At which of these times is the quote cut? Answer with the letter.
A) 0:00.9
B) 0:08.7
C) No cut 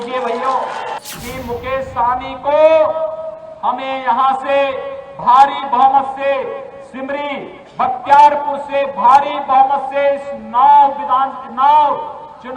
A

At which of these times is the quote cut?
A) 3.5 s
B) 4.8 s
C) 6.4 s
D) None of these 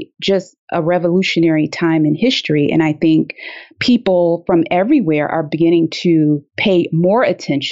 D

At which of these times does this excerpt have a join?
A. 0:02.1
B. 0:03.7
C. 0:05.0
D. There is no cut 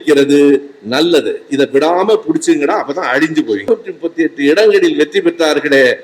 B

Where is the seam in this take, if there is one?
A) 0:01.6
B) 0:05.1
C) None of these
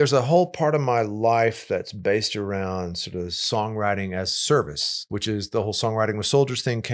B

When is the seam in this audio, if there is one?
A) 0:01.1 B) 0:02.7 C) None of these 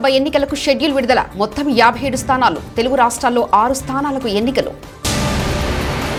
C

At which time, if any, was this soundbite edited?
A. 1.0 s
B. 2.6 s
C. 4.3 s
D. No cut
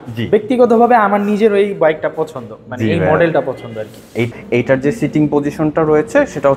C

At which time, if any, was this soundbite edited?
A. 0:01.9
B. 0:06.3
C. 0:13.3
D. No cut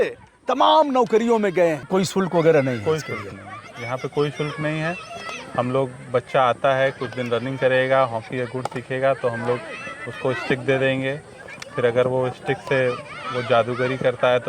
A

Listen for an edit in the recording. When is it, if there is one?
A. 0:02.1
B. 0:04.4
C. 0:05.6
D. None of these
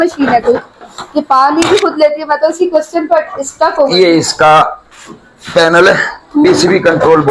D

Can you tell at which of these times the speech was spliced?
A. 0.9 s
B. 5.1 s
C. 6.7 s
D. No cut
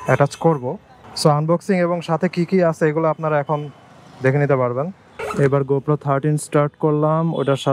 B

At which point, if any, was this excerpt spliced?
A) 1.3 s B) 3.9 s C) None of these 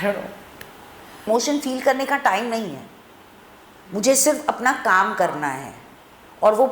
A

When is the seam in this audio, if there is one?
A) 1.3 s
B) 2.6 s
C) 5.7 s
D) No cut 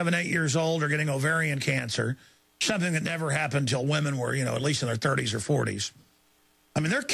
D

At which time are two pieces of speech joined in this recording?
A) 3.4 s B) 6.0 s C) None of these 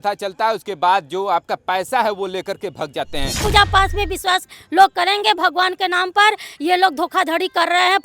A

